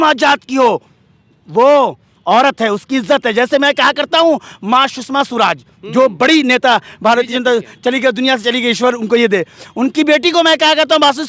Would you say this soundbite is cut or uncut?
uncut